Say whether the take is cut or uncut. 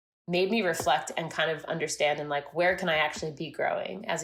uncut